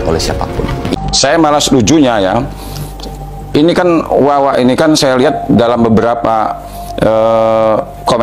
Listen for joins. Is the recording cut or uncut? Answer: cut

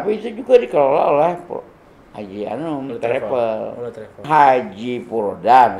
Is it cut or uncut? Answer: cut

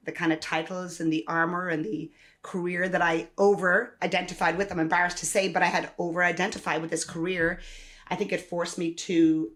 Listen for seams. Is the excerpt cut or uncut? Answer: uncut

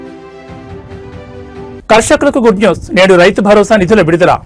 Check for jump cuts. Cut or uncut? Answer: uncut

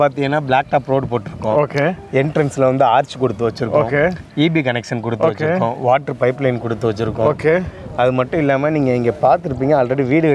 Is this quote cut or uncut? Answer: uncut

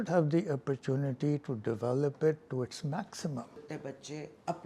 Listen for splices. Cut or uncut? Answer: cut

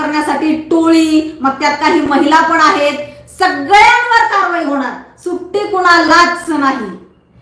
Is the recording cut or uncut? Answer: uncut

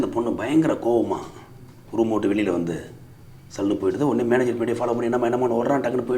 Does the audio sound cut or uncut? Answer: uncut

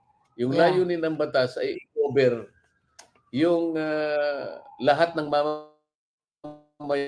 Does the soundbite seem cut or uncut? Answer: uncut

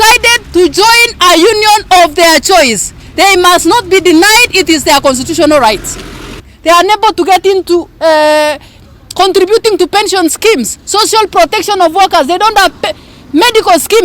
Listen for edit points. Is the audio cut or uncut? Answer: cut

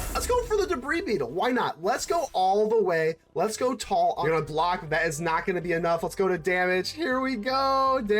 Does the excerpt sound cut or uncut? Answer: cut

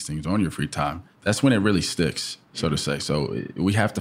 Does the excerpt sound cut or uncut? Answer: cut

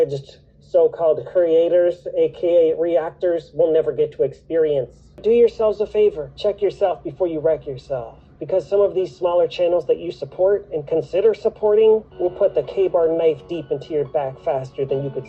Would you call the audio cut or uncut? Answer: cut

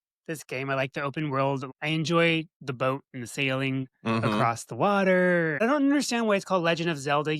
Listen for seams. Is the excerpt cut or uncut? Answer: cut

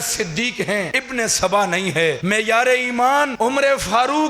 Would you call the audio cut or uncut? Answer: cut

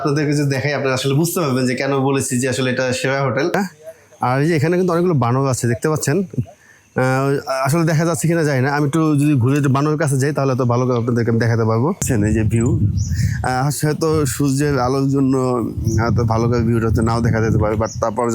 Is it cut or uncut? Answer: cut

